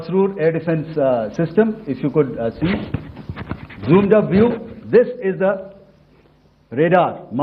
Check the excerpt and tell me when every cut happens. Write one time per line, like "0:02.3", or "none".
none